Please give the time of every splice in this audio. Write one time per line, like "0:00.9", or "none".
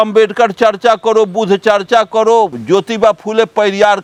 none